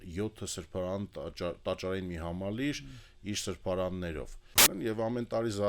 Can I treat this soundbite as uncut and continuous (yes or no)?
no